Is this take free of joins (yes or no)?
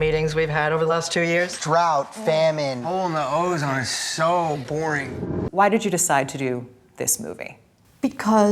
no